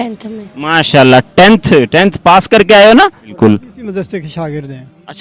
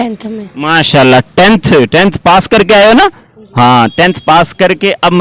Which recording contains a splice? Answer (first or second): first